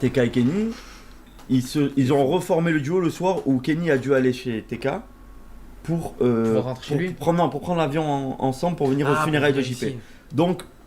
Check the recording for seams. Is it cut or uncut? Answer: uncut